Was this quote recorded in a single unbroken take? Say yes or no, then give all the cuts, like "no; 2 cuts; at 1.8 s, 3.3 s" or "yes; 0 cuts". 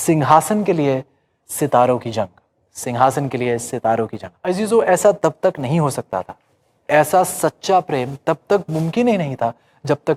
no; 1 cut; at 4.3 s